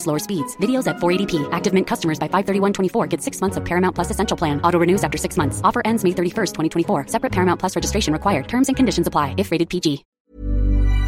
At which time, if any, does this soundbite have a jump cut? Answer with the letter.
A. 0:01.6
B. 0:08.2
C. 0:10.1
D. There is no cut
C